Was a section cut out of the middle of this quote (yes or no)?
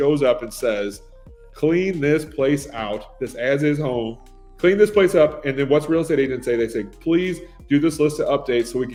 no